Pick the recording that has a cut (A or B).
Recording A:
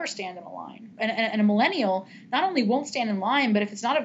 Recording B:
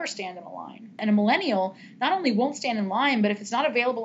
B